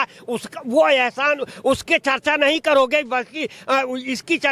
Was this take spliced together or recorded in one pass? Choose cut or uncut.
uncut